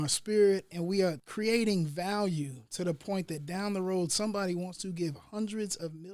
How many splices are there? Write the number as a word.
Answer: one